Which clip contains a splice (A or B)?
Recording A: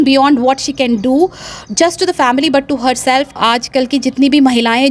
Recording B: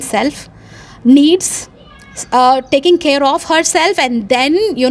A